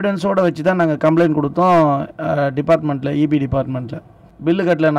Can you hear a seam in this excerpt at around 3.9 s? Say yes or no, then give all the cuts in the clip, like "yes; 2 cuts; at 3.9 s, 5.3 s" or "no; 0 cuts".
yes; 1 cut; at 3.9 s